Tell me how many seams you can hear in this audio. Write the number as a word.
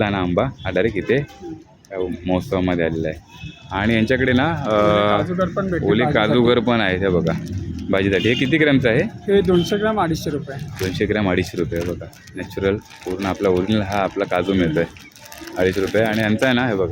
zero